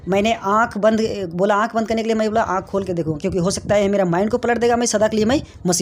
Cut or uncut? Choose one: uncut